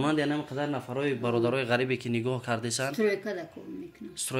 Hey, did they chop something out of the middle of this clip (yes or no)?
no